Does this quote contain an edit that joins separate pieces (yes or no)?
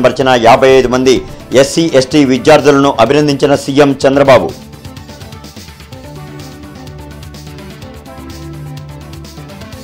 no